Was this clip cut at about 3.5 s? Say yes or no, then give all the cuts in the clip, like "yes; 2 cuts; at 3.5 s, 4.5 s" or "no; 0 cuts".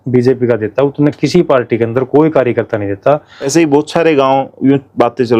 yes; 1 cut; at 3.5 s